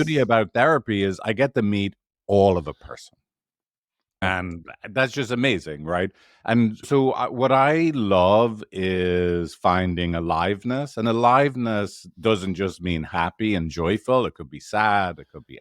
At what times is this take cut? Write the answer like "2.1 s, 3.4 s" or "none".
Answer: 4.2 s